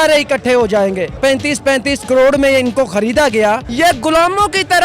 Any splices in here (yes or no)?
yes